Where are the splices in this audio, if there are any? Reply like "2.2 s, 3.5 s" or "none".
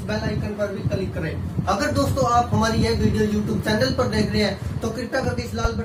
none